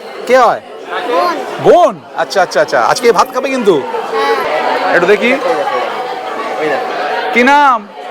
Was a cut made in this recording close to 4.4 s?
yes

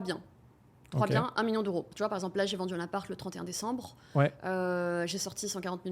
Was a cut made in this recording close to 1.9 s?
yes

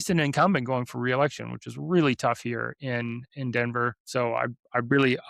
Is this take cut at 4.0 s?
yes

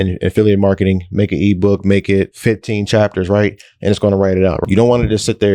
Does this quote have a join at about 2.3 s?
yes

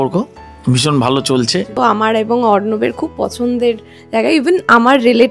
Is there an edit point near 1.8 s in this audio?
yes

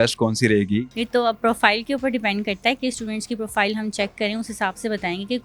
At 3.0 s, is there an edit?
no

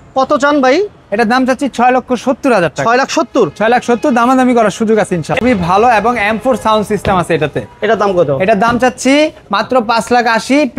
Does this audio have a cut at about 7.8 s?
no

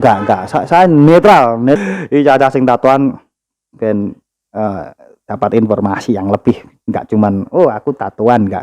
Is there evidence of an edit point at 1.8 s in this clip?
yes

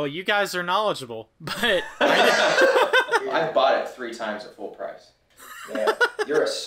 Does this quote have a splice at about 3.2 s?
yes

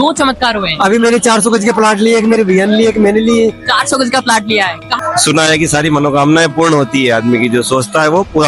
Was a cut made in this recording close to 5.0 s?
yes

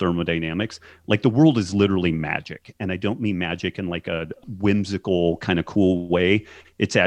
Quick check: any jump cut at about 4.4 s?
yes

